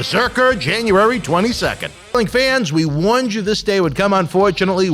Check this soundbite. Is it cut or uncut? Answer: cut